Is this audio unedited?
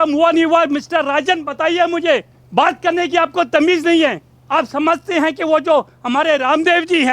no; 2 cuts; at 2.4 s, 4.3 s

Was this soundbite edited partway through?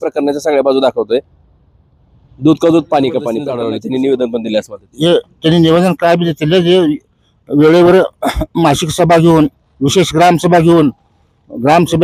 yes; 1 cut; at 3.5 s

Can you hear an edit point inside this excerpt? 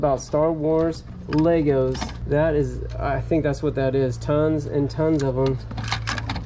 no; 0 cuts

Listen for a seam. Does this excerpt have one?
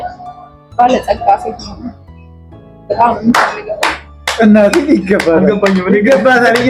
no; 0 cuts

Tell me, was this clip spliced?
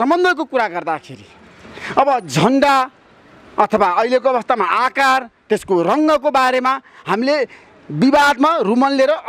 no; 0 cuts

